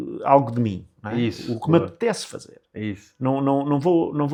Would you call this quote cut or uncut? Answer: uncut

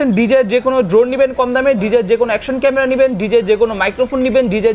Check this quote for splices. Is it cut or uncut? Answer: uncut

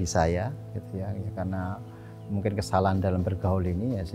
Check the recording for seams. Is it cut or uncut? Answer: uncut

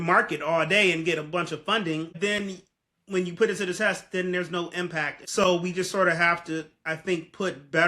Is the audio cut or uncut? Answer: cut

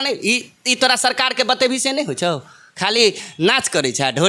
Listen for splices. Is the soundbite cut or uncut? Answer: uncut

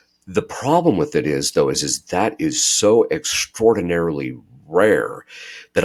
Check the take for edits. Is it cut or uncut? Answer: uncut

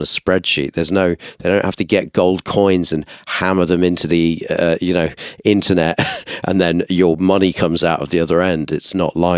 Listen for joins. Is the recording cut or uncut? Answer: uncut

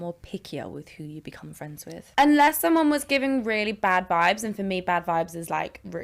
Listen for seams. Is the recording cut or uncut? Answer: cut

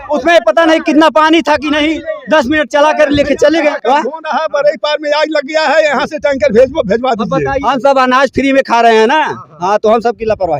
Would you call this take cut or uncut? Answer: cut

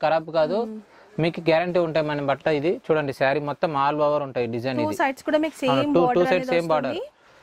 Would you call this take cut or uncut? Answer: uncut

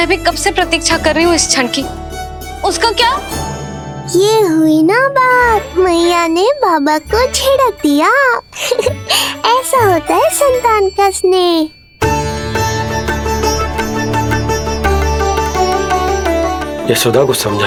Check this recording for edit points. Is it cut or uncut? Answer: uncut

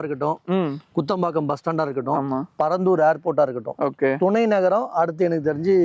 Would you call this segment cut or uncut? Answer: uncut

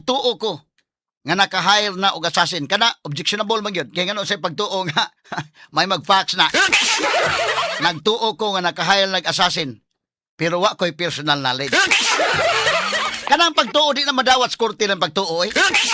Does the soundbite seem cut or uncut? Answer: cut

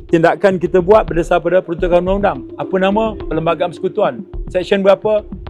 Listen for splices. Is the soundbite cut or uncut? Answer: uncut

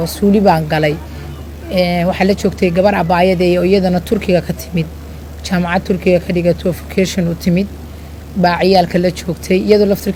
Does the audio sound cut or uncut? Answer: uncut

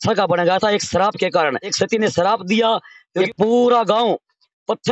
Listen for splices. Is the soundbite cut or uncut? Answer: cut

